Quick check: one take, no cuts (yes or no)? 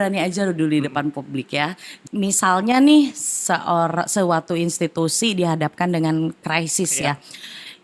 no